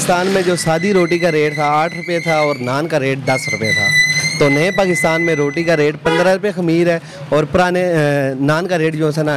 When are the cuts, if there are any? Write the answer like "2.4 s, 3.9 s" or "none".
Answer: none